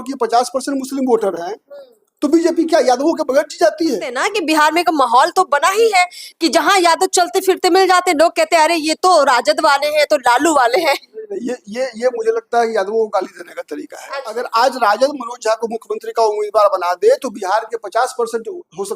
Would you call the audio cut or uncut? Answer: cut